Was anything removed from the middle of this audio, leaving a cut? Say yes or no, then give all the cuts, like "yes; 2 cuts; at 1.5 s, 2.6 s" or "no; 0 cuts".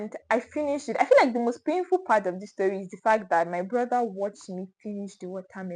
no; 0 cuts